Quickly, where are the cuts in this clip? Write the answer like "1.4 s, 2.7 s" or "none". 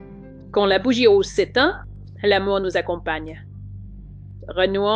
none

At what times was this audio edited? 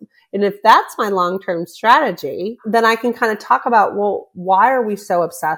2.6 s

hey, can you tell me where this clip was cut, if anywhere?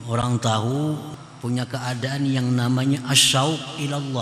1.1 s

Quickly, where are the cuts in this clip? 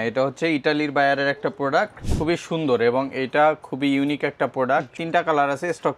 2.0 s, 4.9 s

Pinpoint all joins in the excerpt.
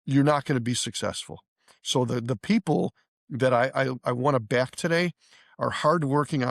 none

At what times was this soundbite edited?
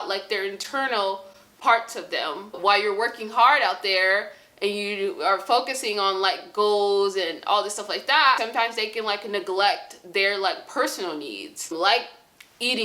2.6 s, 8.4 s, 11.7 s

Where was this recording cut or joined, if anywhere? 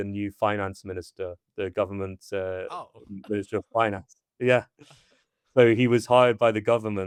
none

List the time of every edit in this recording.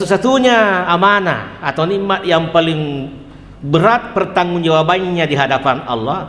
none

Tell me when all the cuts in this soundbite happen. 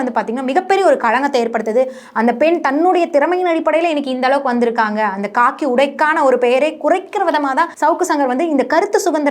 7.7 s

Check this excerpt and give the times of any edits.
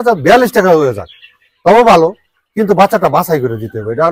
none

